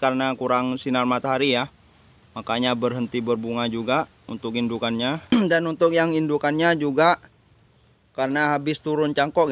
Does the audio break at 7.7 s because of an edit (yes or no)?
no